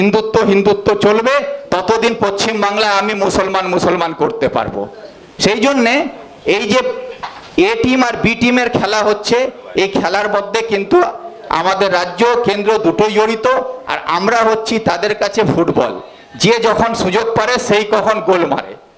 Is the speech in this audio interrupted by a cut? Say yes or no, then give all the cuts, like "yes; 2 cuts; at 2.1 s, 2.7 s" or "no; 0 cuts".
no; 0 cuts